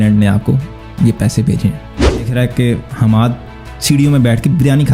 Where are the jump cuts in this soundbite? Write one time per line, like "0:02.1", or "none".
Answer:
0:02.3